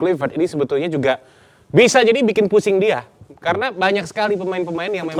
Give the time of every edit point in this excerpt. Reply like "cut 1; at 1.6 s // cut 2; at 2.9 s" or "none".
none